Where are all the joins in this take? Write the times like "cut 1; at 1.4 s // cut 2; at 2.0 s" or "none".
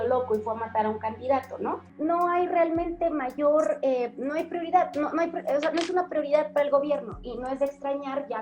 cut 1; at 1.9 s